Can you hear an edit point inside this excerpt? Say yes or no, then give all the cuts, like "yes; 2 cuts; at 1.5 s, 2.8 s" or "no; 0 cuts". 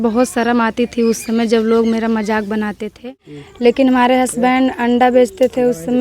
yes; 1 cut; at 3.8 s